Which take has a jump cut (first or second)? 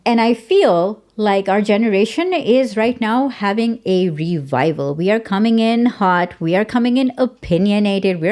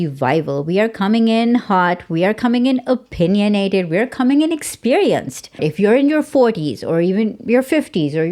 second